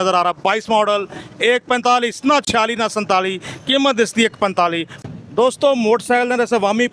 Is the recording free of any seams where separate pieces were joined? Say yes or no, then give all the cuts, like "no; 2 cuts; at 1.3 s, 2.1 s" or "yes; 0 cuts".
no; 1 cut; at 5.0 s